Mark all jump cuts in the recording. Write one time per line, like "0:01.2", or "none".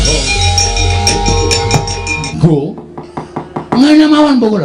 0:02.3